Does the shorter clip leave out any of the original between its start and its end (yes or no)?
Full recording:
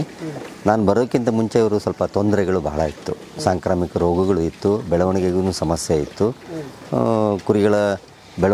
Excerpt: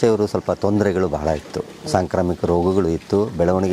no